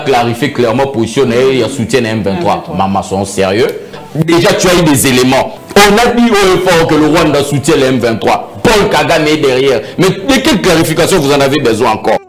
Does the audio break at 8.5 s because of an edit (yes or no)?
no